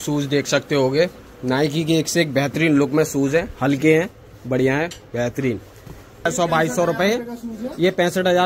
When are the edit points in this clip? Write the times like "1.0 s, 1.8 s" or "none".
6.3 s